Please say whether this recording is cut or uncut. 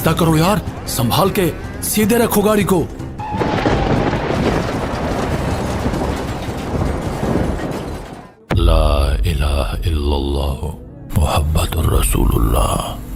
uncut